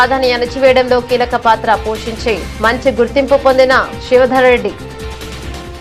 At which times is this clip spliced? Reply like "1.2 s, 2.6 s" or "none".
none